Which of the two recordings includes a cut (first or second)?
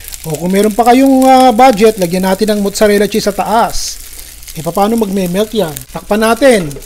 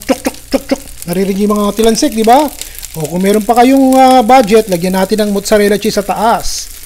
first